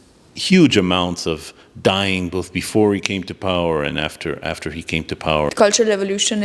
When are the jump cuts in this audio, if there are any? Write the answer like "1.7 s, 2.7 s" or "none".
5.5 s